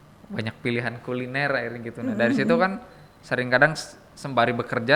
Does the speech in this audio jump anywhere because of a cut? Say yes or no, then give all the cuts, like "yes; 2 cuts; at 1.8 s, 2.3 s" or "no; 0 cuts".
no; 0 cuts